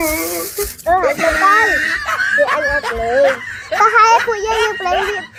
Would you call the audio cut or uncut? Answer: uncut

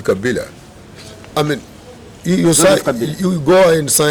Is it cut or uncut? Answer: uncut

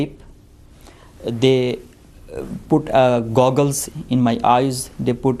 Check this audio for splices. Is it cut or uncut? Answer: cut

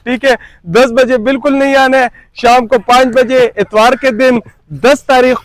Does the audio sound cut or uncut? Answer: uncut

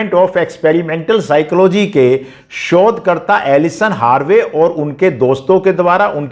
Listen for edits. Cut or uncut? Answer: uncut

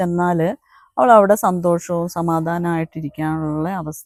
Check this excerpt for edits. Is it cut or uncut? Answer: uncut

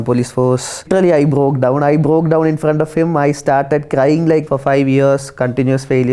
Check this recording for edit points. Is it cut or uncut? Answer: cut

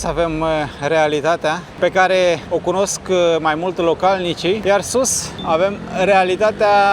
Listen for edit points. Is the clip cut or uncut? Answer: cut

